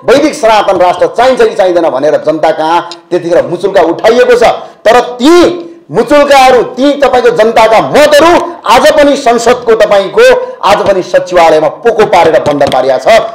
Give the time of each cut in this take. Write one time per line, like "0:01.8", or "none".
none